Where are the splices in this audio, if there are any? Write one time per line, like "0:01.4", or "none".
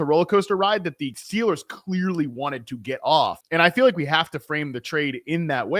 0:01.2
0:03.4